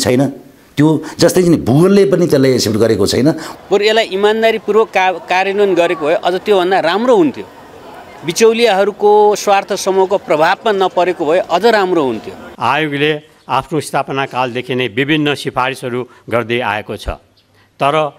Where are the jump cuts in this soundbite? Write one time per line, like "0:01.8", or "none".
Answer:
0:03.5
0:12.4